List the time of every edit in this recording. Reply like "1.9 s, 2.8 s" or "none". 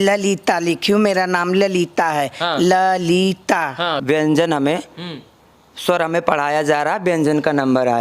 4.0 s

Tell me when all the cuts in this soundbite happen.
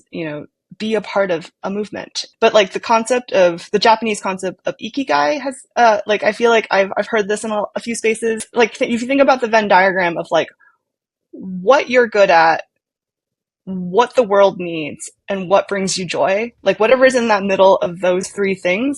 2.2 s, 8.5 s

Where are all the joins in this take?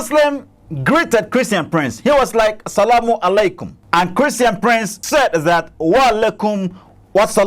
3.7 s, 5.0 s

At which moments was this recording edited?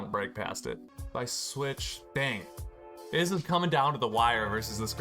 0.9 s

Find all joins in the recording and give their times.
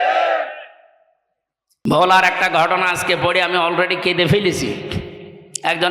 1.8 s

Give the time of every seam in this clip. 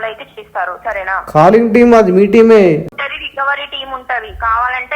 2.9 s

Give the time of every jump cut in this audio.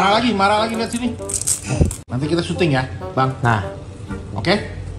2.0 s

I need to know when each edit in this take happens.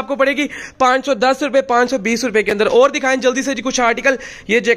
none

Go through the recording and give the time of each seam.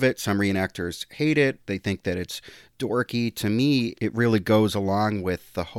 3.9 s

